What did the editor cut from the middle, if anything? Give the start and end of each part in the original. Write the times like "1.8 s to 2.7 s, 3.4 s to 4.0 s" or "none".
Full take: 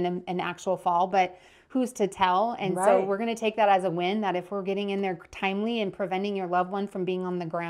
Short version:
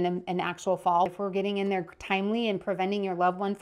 1.1 s to 4.4 s